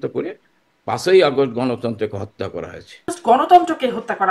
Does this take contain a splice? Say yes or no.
yes